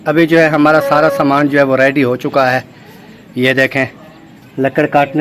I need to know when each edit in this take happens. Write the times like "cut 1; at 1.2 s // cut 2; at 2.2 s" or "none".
none